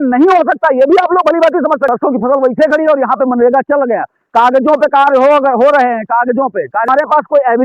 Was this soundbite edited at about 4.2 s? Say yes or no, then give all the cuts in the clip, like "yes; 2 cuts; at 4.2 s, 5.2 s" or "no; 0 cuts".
no; 2 cuts; at 1.9 s, 6.9 s